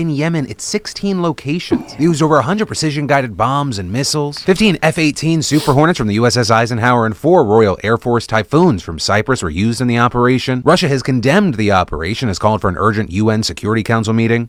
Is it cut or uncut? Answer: uncut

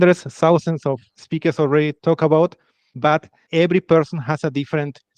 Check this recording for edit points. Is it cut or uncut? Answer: uncut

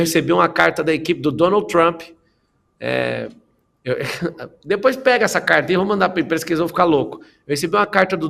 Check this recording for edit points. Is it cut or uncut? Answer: uncut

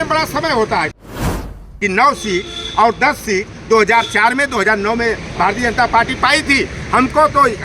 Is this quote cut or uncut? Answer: cut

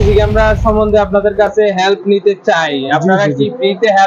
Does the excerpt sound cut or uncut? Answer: uncut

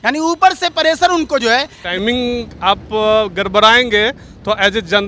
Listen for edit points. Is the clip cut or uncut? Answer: cut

